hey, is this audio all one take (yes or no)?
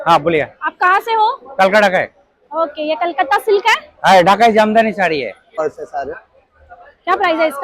no